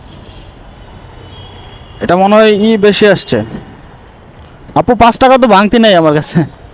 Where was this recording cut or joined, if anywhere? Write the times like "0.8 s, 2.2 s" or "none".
none